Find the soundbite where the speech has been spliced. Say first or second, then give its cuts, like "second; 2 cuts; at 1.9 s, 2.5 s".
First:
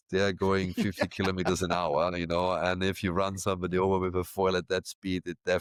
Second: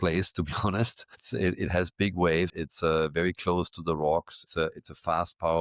second; 1 cut; at 2.5 s